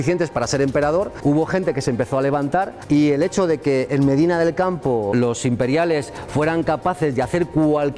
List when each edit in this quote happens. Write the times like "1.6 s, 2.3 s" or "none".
none